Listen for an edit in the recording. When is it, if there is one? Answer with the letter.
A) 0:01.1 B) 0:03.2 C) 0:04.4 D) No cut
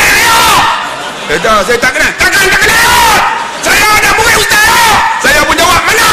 D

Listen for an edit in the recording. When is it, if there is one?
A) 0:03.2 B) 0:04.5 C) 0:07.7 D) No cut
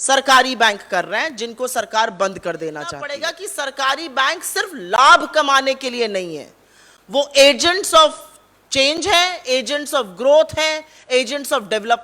A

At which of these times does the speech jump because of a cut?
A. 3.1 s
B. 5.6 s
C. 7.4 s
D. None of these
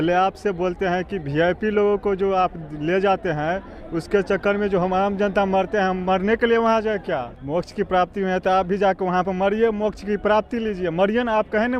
C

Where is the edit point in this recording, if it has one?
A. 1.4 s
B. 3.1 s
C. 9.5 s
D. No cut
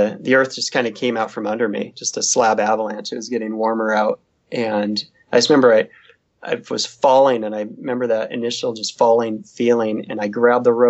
D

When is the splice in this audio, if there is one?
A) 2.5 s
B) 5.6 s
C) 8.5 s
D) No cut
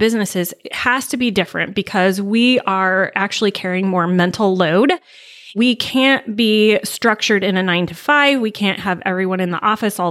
B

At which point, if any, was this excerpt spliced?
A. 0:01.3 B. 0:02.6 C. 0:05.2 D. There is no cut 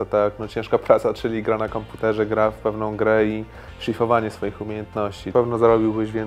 C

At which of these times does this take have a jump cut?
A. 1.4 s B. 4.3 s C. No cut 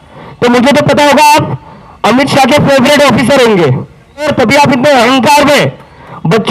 B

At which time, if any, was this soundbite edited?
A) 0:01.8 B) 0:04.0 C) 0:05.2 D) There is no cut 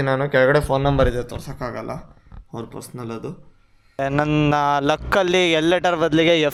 B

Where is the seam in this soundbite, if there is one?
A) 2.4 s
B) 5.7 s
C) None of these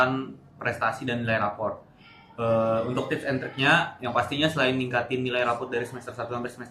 C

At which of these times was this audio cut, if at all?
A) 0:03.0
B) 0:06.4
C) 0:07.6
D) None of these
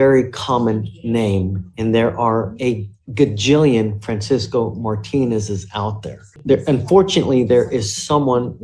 B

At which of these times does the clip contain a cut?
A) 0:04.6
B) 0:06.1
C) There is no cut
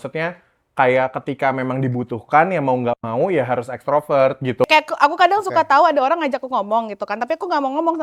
A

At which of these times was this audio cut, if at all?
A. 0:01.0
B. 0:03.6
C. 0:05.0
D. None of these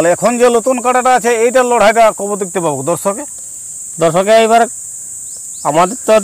D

